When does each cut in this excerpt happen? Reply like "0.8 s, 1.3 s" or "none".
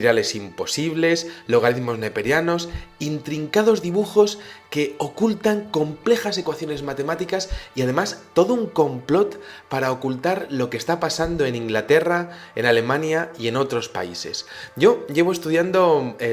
10.0 s